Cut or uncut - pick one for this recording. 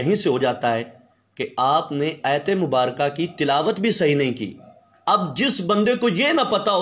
cut